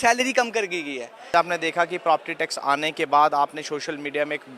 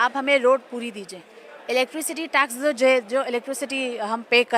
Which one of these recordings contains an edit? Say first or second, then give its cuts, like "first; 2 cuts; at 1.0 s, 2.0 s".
first; 1 cut; at 1.3 s